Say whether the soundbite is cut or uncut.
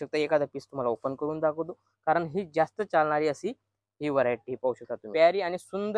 cut